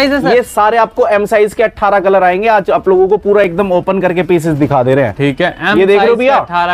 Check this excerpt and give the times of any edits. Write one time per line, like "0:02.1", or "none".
none